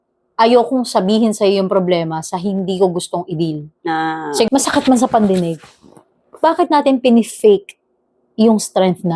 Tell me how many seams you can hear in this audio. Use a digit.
1